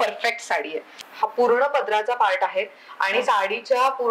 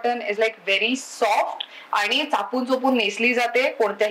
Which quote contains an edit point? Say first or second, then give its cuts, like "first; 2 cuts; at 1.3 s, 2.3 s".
first; 1 cut; at 1.0 s